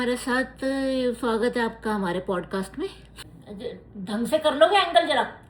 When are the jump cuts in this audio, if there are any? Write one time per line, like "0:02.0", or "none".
0:03.2